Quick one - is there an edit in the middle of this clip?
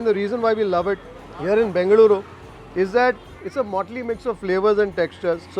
no; 0 cuts

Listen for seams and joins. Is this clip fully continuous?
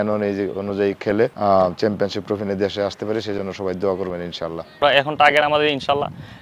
no; 2 cuts; at 1.4 s, 4.8 s

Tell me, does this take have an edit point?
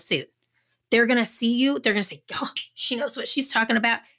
no; 0 cuts

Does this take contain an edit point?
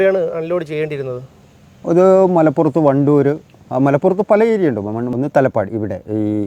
yes; 1 cut; at 5.1 s

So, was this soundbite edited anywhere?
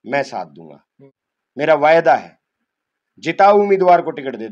no; 0 cuts

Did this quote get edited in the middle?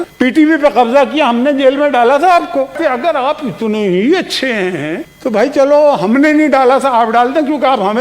yes; 1 cut; at 2.8 s

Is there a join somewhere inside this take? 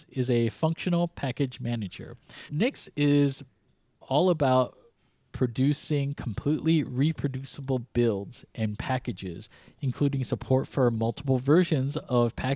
yes; 2 cuts; at 2.5 s, 4.0 s

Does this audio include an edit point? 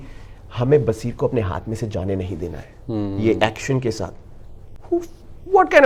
no; 0 cuts

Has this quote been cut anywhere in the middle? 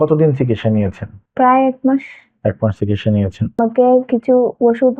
yes; 1 cut; at 3.6 s

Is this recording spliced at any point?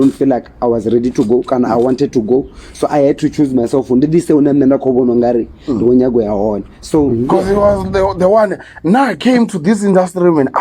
yes; 1 cut; at 7.1 s

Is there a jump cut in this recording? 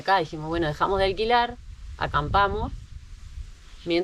no; 0 cuts

